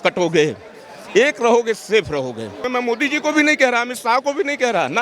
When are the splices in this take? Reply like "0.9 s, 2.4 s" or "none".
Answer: 2.6 s